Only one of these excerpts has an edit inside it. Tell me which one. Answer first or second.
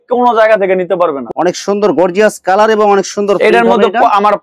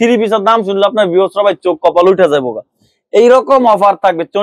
first